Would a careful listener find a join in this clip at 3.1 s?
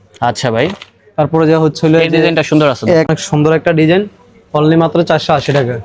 yes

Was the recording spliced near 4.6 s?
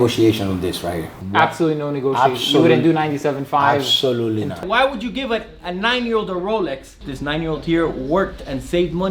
yes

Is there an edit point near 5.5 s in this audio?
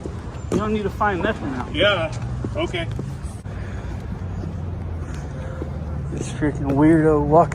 no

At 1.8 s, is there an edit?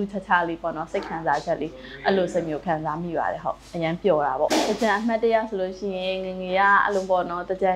no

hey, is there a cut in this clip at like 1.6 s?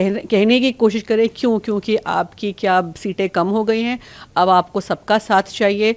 no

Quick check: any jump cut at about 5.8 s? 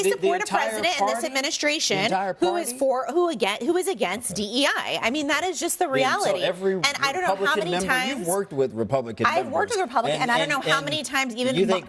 no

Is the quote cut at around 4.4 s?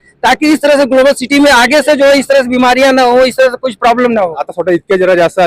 yes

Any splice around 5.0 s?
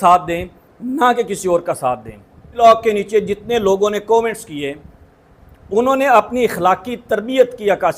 no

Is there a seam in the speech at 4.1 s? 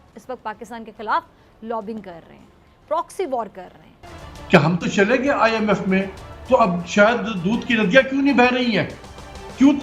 yes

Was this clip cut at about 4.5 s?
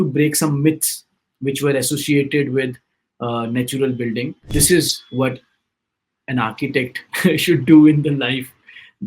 yes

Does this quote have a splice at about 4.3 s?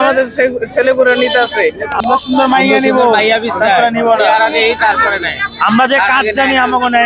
no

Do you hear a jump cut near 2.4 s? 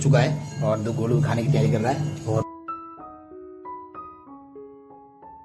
yes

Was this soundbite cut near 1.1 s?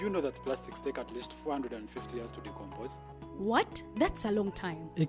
yes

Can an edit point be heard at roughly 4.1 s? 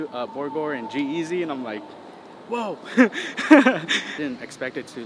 yes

